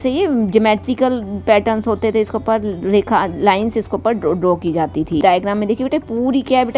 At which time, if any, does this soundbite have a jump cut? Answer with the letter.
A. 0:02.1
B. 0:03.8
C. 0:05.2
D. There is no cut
C